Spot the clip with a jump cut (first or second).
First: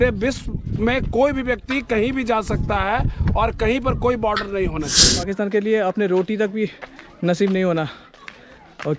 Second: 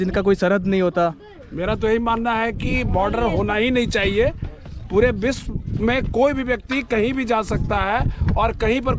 first